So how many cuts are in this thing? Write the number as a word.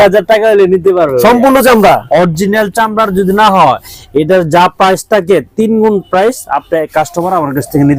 zero